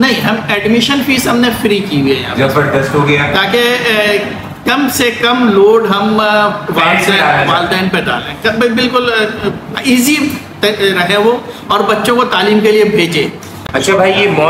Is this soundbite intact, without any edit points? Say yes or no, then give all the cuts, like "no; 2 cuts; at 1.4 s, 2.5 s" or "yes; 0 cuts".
yes; 0 cuts